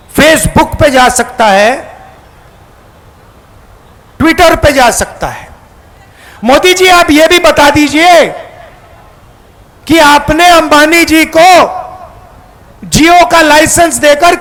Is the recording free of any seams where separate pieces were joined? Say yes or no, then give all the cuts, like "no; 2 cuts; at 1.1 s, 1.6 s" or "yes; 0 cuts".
yes; 0 cuts